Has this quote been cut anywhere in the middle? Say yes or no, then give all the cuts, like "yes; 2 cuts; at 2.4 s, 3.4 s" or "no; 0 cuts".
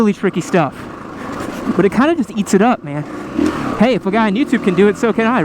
yes; 1 cut; at 3.2 s